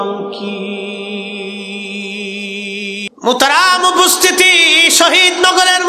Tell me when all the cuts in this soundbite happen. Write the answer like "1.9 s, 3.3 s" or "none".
3.1 s